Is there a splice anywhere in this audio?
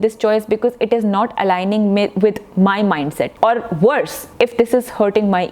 yes; 2 cuts; at 3.3 s, 4.2 s

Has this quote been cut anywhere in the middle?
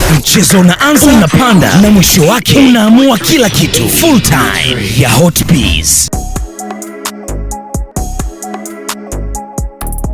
yes; 2 cuts; at 6.0 s, 7.9 s

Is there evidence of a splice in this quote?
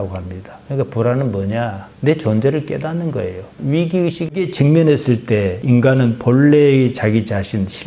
yes; 2 cuts; at 3.6 s, 4.4 s

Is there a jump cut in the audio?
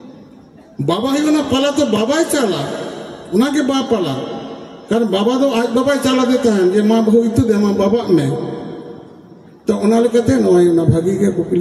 no; 0 cuts

